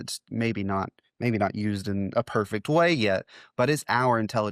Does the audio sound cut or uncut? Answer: uncut